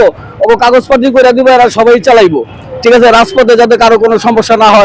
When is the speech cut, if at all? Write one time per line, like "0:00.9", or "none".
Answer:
none